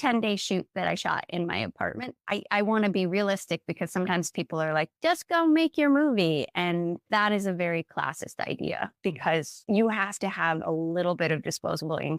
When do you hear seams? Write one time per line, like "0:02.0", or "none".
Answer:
0:02.3